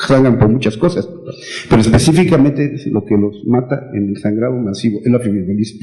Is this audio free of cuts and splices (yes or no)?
no